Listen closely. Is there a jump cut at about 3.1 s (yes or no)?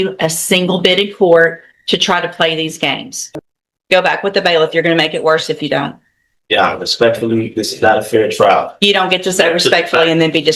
yes